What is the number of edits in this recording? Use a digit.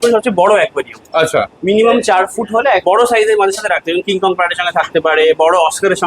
1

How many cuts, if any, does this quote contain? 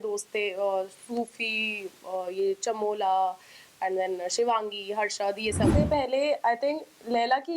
1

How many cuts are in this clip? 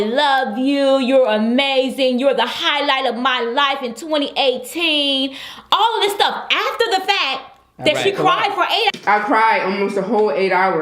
0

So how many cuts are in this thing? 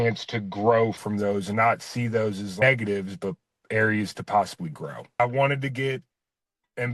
1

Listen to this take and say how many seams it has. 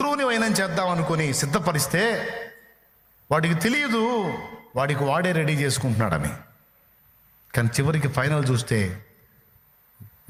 0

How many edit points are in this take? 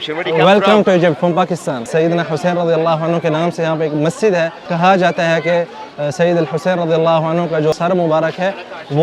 3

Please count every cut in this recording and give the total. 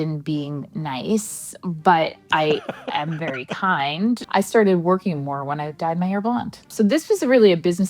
2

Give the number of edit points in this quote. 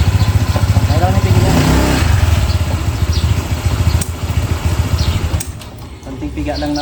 0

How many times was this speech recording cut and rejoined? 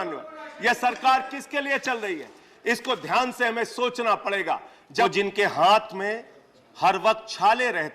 1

